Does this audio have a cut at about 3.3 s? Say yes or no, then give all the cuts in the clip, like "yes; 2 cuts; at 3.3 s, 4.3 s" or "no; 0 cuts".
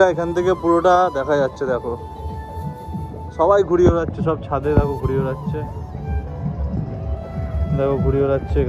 no; 0 cuts